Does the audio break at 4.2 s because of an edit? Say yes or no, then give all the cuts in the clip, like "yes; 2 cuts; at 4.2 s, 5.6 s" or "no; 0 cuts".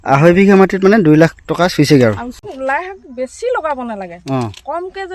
no; 1 cut; at 2.5 s